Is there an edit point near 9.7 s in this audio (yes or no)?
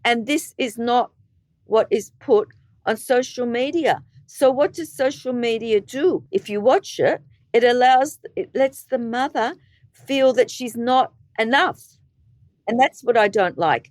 no